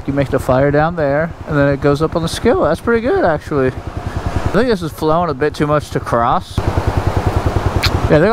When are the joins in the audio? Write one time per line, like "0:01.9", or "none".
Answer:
none